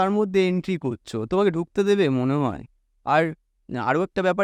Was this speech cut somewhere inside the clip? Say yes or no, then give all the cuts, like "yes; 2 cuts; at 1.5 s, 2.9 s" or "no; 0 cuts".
no; 0 cuts